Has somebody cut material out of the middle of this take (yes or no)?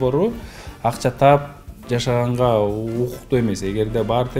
no